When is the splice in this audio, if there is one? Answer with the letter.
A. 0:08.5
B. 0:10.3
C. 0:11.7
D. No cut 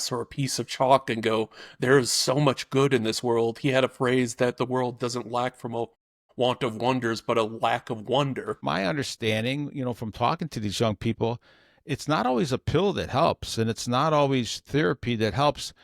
A